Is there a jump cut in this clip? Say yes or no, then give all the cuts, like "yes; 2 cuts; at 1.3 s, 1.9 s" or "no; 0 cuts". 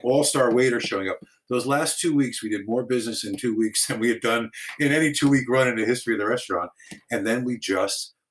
no; 0 cuts